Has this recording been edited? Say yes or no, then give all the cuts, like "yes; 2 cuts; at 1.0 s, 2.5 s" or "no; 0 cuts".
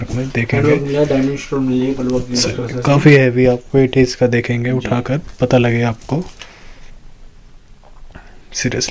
no; 0 cuts